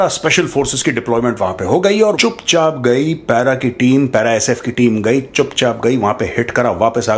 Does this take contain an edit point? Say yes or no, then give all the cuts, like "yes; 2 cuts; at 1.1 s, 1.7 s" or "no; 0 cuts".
yes; 1 cut; at 2.2 s